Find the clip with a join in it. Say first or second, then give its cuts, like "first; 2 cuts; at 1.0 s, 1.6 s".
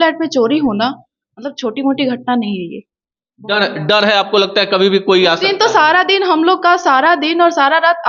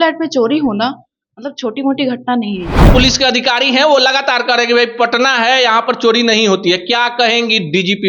second; 1 cut; at 2.8 s